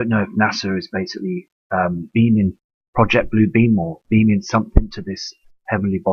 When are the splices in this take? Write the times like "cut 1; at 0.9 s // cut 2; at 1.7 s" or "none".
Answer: none